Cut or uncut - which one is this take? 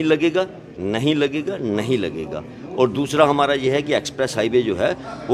uncut